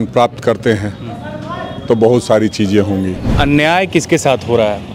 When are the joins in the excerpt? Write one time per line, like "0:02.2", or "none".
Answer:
0:03.3